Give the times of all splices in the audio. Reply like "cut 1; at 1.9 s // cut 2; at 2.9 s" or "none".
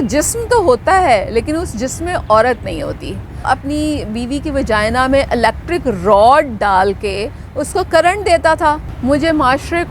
cut 1; at 3.5 s // cut 2; at 8.9 s